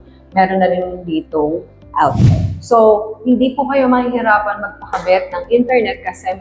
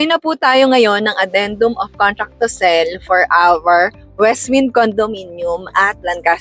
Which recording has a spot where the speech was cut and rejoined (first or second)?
first